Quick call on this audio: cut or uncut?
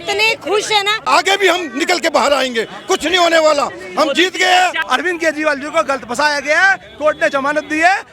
cut